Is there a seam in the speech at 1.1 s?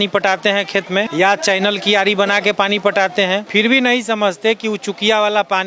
yes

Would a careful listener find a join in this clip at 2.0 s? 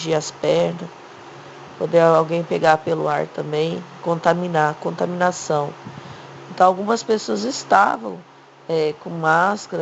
no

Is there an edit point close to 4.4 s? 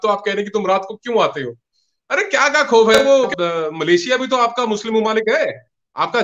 no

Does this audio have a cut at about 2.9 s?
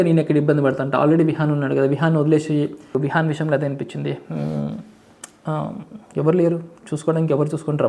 yes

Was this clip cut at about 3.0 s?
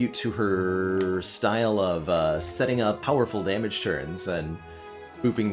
yes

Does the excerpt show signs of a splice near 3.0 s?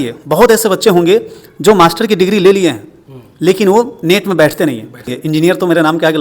no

